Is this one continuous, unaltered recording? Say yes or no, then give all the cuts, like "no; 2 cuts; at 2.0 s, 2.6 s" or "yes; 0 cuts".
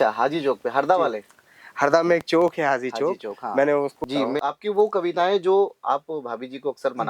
no; 1 cut; at 4.0 s